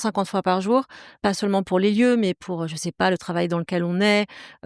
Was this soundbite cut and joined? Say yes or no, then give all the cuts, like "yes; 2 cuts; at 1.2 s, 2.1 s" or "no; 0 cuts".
yes; 1 cut; at 1.1 s